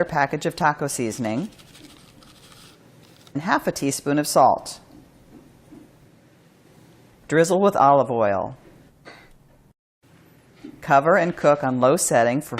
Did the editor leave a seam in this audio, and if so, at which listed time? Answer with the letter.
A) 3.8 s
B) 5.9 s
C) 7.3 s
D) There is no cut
A